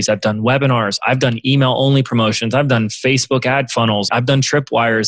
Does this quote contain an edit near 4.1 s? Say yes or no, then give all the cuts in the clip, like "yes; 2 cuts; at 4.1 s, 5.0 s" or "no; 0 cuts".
yes; 1 cut; at 4.1 s